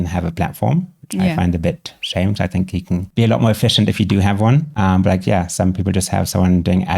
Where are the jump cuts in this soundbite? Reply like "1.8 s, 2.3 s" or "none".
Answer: 3.1 s, 4.7 s